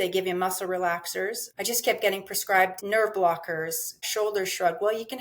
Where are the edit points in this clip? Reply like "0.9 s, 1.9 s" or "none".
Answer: 1.4 s, 2.8 s, 4.0 s